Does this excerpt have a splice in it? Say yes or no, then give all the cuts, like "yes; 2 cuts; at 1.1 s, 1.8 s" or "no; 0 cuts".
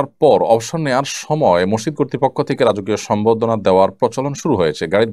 no; 0 cuts